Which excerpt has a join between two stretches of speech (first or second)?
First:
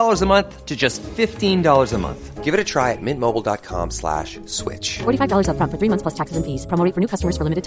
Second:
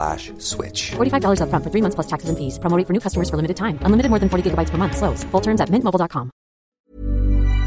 second